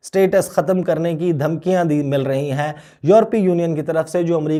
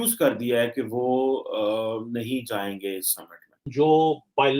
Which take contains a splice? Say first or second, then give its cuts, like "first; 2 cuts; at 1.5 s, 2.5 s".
second; 1 cut; at 3.7 s